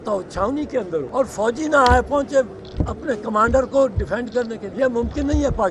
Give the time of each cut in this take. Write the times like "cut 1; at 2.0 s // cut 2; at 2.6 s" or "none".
cut 1; at 1.1 s // cut 2; at 4.7 s